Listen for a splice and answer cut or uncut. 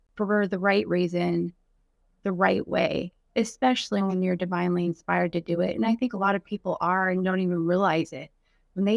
cut